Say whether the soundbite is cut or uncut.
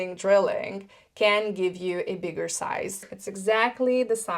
cut